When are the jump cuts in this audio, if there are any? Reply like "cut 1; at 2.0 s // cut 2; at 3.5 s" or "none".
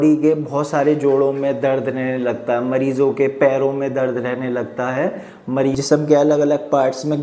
cut 1; at 5.7 s